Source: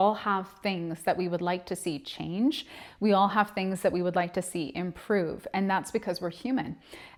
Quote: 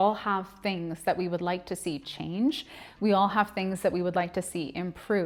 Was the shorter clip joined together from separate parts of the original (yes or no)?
no